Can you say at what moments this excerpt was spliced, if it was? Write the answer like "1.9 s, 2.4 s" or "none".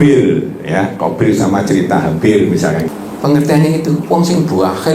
2.9 s